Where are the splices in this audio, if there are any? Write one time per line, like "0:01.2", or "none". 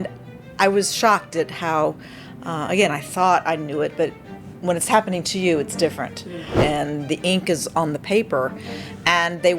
0:06.5

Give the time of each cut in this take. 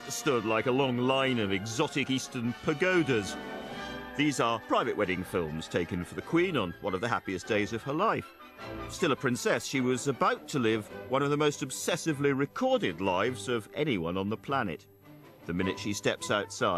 0:03.3

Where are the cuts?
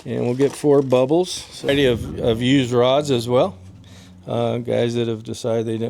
0:01.7

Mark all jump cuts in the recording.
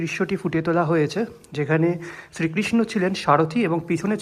none

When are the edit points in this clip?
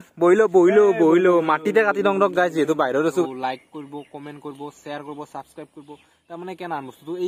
0:03.2

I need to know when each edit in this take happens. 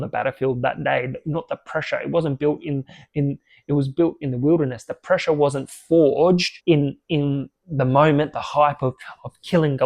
0:06.5

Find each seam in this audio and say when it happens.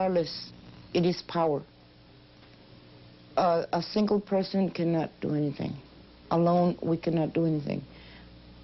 none

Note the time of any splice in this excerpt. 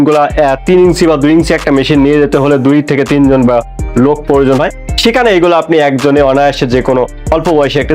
none

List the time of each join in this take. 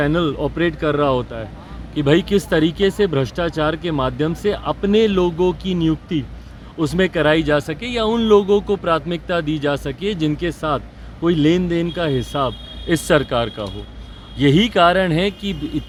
none

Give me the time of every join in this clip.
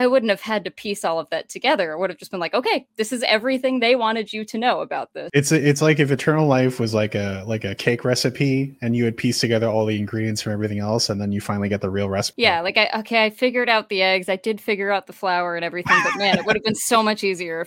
0:05.3
0:12.3

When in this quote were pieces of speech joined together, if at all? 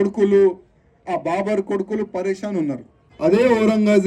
0:03.0

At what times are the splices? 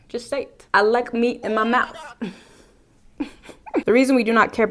none

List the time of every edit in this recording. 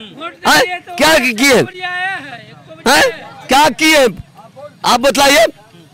none

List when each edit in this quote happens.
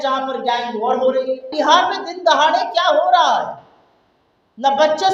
0:01.5

